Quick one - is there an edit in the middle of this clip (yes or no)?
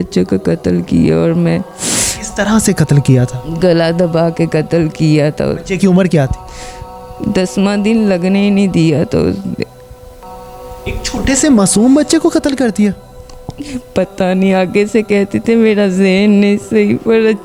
no